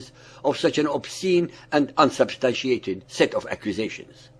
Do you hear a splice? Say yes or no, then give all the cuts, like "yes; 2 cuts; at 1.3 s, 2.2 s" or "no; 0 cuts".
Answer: no; 0 cuts